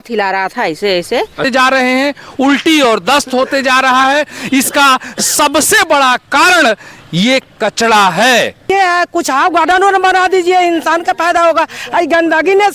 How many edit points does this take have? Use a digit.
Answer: 2